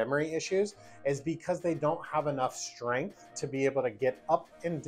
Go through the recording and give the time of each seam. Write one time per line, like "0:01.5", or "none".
none